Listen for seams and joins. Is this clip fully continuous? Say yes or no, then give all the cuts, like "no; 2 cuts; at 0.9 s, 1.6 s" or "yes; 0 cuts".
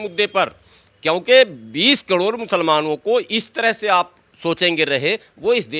yes; 0 cuts